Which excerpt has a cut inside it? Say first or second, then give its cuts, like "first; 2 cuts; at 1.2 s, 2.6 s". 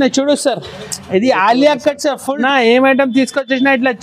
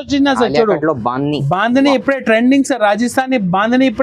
first; 1 cut; at 2.4 s